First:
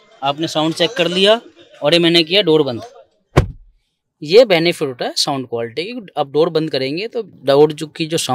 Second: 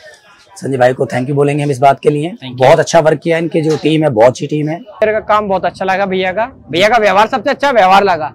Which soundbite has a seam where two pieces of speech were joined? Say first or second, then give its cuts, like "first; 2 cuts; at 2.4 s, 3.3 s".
second; 1 cut; at 5.0 s